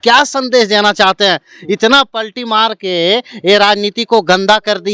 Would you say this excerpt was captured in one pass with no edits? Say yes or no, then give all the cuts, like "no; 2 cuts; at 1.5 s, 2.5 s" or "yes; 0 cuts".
yes; 0 cuts